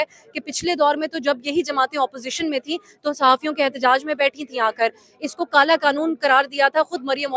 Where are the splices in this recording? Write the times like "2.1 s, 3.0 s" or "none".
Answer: none